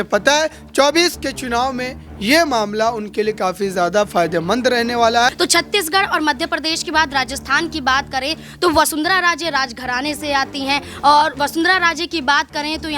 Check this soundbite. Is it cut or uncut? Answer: cut